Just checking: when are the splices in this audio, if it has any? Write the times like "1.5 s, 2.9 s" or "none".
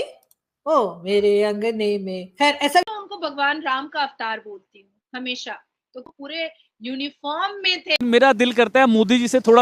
2.8 s, 8.0 s